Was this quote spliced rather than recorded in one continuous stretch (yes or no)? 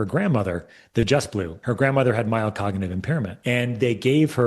yes